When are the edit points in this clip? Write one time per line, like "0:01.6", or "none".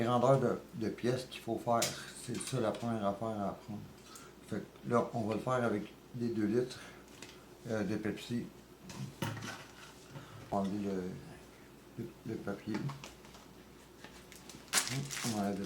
0:10.5
0:14.7